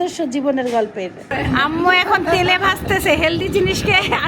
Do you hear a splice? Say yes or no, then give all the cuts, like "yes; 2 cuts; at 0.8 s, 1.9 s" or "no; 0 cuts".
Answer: yes; 1 cut; at 1.2 s